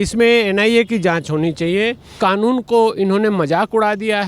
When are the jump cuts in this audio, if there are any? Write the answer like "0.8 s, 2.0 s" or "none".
2.1 s

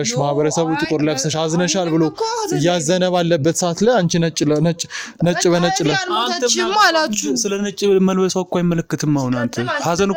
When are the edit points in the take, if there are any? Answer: none

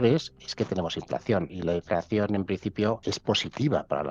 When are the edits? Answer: 1.5 s, 3.0 s

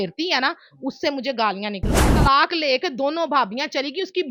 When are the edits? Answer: 2.2 s

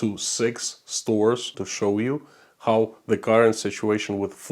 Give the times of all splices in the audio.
1.6 s

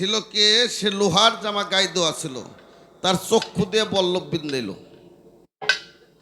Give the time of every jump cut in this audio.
none

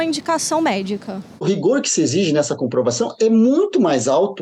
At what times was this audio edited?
1.4 s

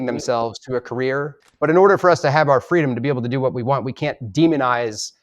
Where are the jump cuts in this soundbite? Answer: 1.4 s

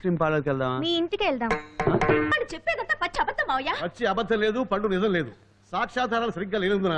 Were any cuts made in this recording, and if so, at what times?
2.3 s

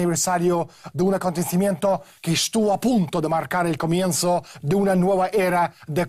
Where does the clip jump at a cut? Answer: none

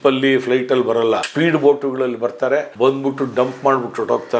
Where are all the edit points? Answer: 1.3 s, 2.7 s

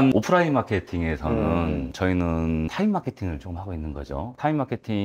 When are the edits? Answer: none

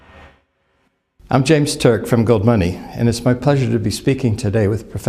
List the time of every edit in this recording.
none

